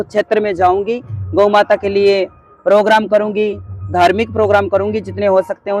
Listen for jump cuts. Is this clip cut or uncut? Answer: uncut